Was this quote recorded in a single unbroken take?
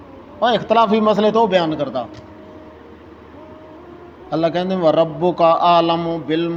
yes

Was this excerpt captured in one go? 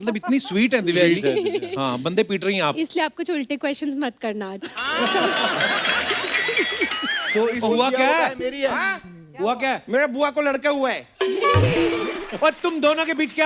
no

